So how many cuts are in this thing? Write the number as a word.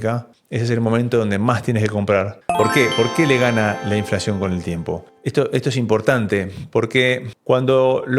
one